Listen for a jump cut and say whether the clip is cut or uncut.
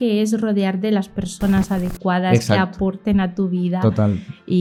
uncut